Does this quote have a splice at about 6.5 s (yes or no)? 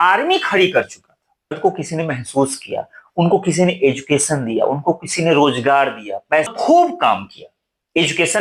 yes